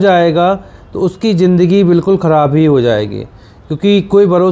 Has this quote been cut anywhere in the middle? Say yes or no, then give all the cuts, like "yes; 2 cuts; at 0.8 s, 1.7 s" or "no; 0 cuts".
no; 0 cuts